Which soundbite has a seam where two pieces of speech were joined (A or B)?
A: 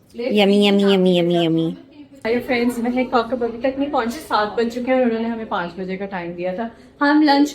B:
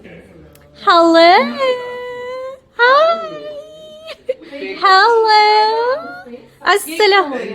A